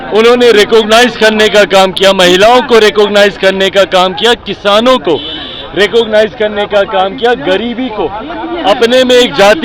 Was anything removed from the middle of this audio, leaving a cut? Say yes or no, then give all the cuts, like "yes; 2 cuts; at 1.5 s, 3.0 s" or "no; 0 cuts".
no; 0 cuts